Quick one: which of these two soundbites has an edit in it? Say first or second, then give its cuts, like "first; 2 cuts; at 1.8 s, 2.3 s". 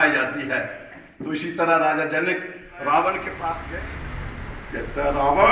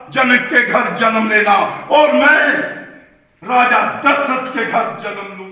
first; 1 cut; at 3.6 s